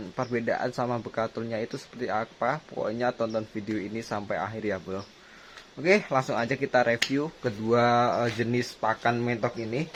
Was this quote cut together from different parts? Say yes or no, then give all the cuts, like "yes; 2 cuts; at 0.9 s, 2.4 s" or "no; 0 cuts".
no; 0 cuts